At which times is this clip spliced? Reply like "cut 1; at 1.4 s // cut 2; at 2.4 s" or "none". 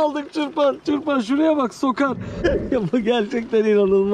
cut 1; at 2.4 s